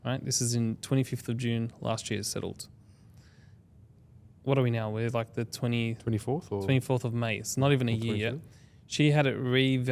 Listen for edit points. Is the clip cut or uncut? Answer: uncut